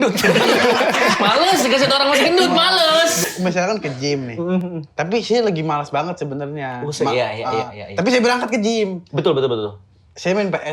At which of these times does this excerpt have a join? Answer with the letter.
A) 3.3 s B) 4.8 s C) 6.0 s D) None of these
A